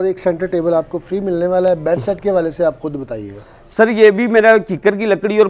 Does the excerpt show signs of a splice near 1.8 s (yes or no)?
no